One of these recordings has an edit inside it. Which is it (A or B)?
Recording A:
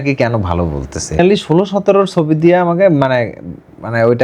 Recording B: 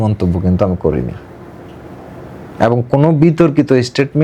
A